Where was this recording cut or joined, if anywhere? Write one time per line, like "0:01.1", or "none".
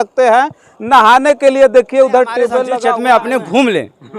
0:02.7